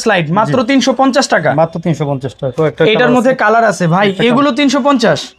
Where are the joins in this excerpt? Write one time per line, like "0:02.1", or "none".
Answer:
none

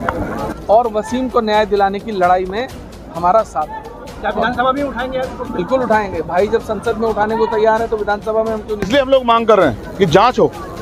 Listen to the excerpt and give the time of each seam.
0:08.9

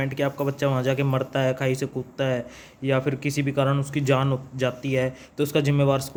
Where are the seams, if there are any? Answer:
none

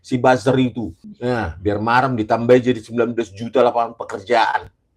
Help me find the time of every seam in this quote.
0:01.0

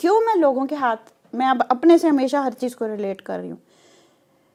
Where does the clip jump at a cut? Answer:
none

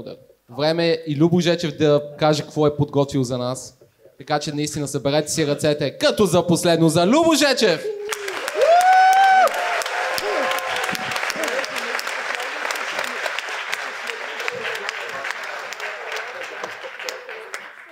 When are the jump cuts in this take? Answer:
none

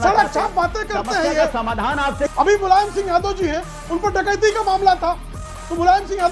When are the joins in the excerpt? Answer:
0:02.4

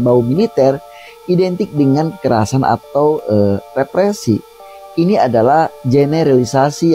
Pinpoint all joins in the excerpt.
none

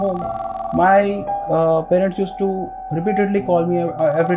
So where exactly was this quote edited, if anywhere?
none

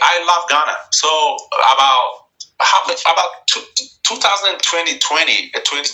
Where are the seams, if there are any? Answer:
none

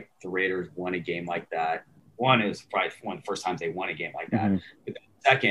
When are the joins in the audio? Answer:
0:02.0

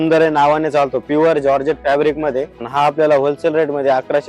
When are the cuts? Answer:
0:02.6

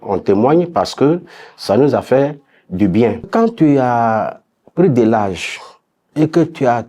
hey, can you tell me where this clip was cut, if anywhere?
0:03.3

